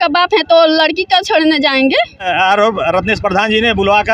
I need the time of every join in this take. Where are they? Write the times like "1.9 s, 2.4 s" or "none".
2.3 s